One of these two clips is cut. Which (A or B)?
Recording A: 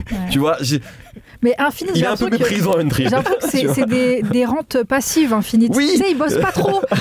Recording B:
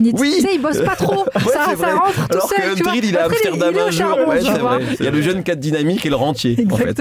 B